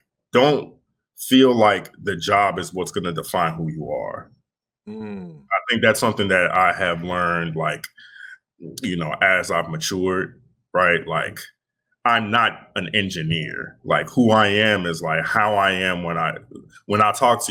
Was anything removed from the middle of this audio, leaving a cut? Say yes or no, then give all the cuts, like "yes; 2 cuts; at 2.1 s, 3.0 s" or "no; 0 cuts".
no; 0 cuts